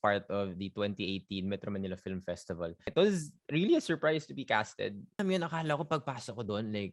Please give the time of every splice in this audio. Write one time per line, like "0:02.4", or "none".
0:02.9
0:05.2